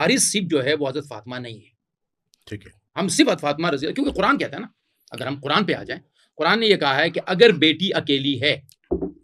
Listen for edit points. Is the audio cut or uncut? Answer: uncut